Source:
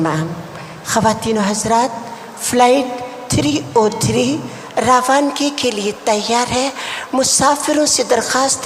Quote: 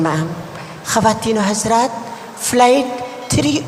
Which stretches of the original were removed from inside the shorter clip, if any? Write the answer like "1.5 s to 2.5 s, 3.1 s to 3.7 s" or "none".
none